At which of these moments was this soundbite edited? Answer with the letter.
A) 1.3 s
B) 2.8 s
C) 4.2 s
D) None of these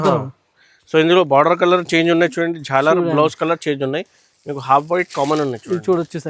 D